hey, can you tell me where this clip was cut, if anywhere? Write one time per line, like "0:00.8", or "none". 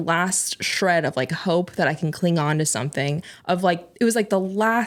none